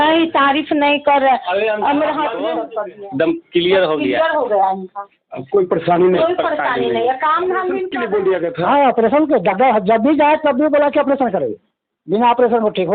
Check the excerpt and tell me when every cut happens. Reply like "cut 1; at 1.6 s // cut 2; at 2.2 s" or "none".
cut 1; at 2.5 s // cut 2; at 7.9 s